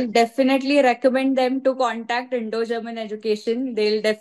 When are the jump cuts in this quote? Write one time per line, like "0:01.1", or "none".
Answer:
none